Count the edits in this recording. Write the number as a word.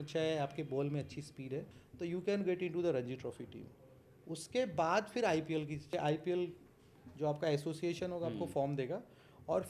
two